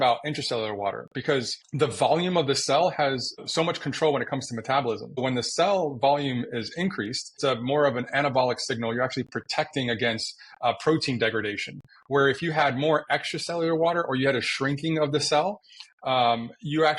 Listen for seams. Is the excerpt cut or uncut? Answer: cut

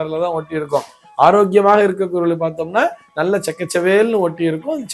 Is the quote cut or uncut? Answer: uncut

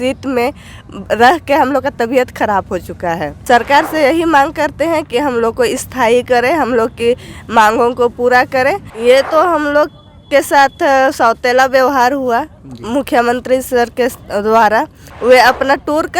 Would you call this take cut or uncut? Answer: cut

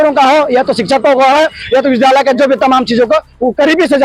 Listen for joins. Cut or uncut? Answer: uncut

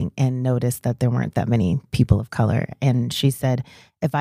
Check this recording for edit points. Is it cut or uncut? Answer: uncut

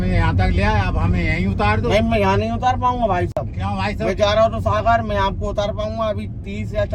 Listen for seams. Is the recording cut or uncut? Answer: uncut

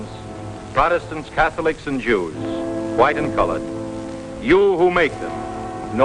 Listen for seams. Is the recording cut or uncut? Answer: uncut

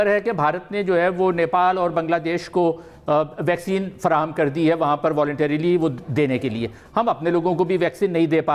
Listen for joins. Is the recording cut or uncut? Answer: uncut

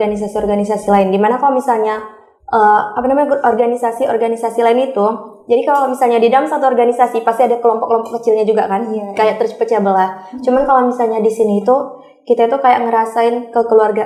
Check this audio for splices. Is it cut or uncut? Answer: uncut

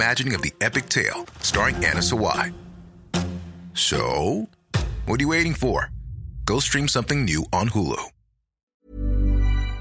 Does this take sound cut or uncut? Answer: cut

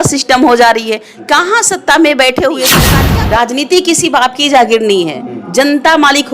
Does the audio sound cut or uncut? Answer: cut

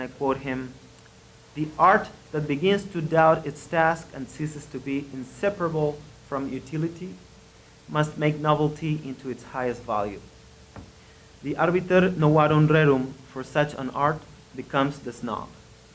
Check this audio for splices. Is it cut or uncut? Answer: cut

